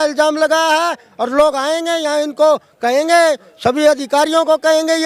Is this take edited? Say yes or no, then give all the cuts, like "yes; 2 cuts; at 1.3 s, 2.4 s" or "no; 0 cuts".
no; 0 cuts